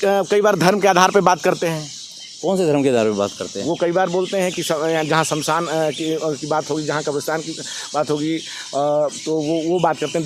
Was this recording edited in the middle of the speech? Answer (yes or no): no